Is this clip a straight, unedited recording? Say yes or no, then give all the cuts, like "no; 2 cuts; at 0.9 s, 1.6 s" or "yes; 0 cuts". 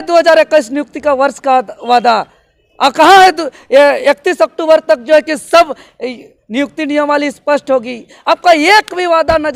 yes; 0 cuts